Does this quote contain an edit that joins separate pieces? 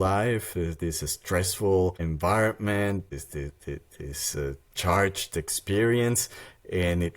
yes; 2 cuts; at 2.0 s, 3.1 s

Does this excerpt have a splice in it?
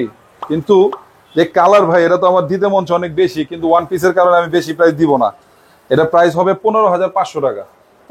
no; 0 cuts

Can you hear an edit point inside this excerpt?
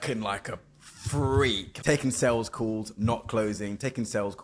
yes; 1 cut; at 1.7 s

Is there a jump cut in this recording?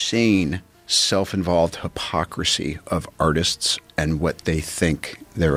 no; 0 cuts

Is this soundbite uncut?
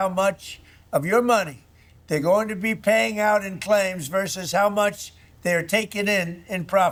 yes; 0 cuts

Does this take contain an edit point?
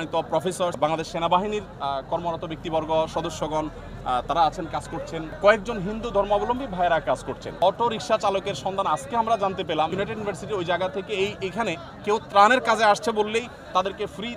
yes; 4 cuts; at 0.8 s, 5.4 s, 7.5 s, 9.9 s

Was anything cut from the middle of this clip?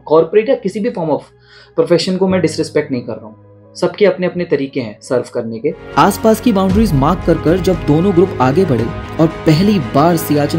yes; 1 cut; at 5.8 s

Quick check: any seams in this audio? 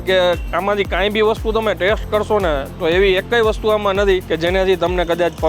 yes; 1 cut; at 4.3 s

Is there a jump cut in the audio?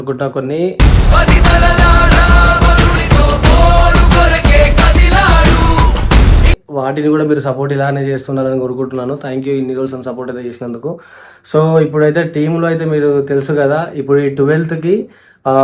no; 0 cuts

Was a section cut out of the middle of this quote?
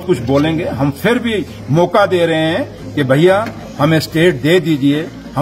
no; 0 cuts

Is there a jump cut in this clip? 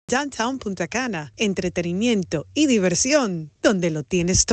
no; 0 cuts

